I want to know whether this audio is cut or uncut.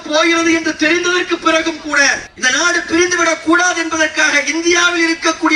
uncut